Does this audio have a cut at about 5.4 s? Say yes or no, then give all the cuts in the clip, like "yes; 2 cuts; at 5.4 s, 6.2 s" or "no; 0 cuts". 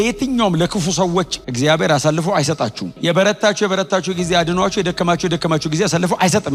no; 0 cuts